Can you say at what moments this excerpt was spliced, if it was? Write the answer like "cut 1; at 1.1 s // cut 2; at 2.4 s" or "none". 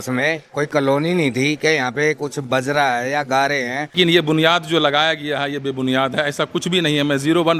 cut 1; at 4.0 s